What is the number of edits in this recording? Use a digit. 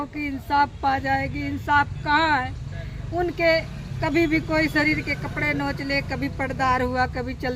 0